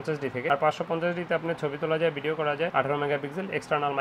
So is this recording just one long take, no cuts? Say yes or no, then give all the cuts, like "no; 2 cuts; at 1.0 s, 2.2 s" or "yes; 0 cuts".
yes; 0 cuts